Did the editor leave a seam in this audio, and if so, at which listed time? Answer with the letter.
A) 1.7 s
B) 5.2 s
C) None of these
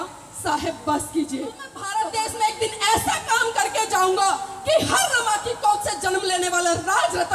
A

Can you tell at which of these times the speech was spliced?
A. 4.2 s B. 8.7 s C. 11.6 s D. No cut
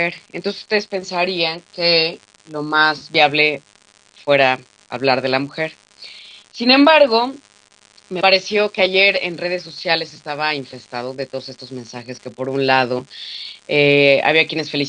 B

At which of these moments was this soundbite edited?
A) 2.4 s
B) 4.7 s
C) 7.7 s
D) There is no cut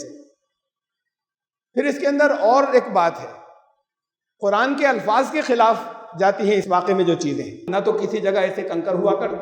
C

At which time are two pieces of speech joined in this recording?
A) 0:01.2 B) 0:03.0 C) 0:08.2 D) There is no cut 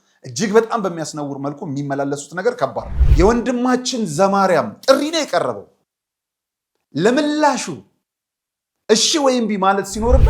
B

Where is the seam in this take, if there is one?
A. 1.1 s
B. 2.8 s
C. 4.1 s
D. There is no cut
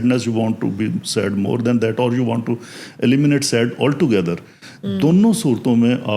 D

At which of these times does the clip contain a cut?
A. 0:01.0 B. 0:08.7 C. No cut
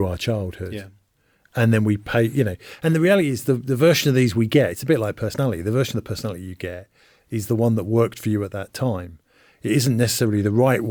C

